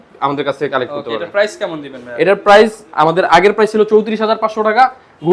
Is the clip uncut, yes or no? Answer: yes